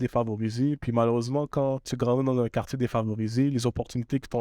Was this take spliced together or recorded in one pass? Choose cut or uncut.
cut